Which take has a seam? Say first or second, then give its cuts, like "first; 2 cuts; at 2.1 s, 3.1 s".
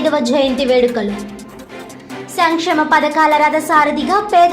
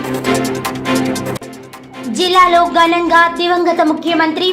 second; 1 cut; at 1.0 s